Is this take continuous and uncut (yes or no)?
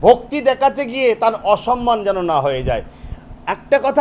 yes